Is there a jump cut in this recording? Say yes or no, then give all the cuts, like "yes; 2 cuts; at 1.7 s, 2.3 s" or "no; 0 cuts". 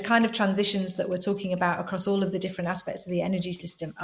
no; 0 cuts